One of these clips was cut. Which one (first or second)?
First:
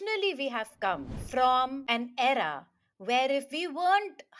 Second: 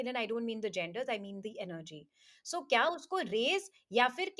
first